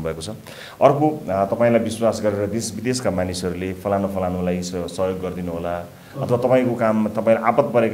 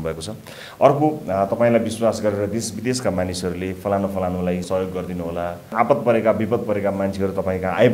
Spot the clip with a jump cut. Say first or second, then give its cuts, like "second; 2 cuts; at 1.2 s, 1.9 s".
second; 2 cuts; at 4.6 s, 5.7 s